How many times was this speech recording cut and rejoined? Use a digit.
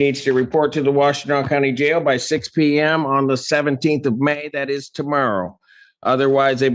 0